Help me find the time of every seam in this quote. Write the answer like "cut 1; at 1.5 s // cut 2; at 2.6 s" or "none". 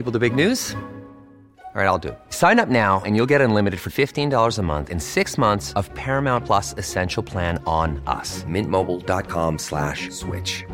none